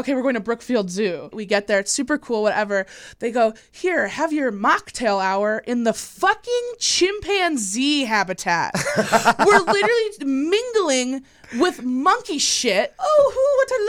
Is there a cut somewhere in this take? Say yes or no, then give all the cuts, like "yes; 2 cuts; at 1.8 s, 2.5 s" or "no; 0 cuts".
yes; 2 cuts; at 1.4 s, 12.9 s